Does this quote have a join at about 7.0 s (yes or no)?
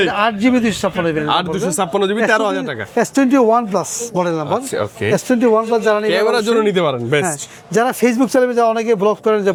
no